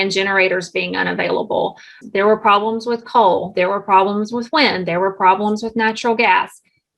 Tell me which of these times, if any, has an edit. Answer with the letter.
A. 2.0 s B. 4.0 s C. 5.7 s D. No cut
A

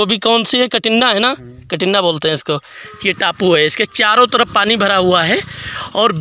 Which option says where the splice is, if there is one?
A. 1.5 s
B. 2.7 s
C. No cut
B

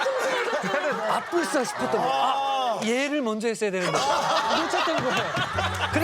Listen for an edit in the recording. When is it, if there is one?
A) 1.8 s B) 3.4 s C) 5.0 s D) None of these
D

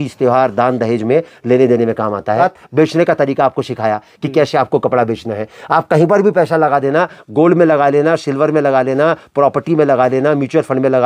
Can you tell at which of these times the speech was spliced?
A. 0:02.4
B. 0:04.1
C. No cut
A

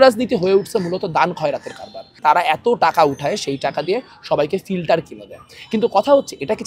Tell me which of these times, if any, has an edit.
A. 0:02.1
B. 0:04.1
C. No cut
A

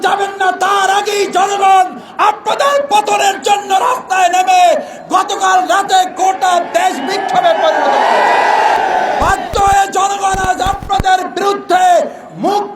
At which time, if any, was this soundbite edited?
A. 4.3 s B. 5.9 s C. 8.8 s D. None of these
C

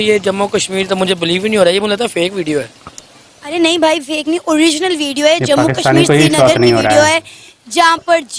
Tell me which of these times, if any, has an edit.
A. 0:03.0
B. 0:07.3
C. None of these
C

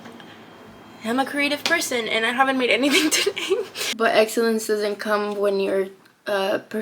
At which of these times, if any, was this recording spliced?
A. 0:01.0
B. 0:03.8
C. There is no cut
B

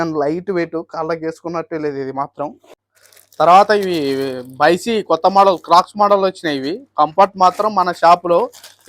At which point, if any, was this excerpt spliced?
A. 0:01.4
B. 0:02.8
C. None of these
B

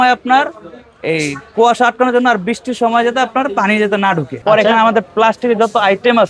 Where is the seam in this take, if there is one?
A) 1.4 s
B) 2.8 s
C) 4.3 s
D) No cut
C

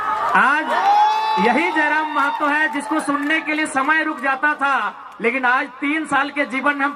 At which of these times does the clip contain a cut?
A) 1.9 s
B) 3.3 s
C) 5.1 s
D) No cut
D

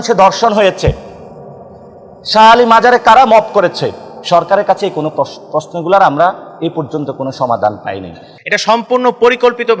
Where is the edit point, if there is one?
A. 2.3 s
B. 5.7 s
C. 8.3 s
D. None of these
C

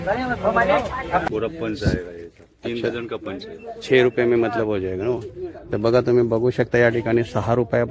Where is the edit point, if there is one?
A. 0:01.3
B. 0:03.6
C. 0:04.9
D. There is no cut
A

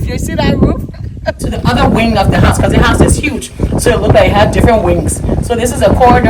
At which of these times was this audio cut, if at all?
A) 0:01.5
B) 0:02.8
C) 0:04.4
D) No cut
A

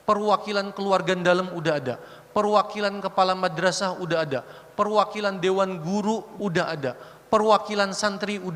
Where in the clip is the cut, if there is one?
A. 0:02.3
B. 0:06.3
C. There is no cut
B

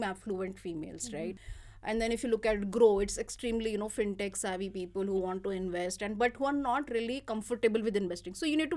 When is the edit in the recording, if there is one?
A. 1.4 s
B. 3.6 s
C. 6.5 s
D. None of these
A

